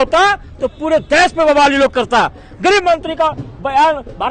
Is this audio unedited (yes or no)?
yes